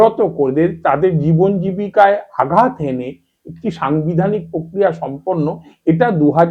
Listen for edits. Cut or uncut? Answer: uncut